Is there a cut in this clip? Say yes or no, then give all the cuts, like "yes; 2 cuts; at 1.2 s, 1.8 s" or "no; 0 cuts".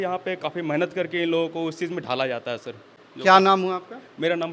no; 0 cuts